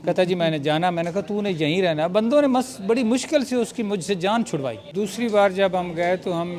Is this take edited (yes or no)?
yes